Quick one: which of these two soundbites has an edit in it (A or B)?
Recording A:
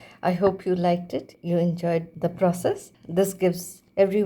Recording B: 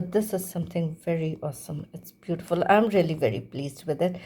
A